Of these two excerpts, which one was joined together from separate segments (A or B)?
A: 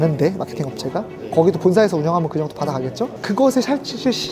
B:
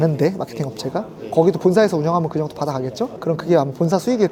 A